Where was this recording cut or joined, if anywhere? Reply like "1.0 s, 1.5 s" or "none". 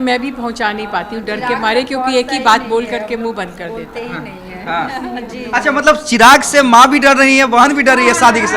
none